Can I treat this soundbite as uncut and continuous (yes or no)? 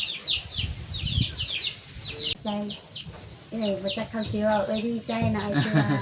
no